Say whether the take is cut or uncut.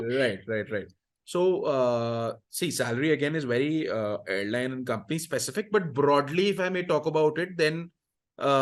uncut